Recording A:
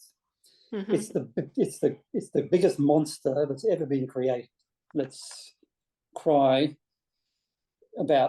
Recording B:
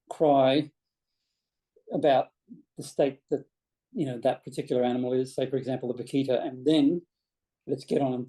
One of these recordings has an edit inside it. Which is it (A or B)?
A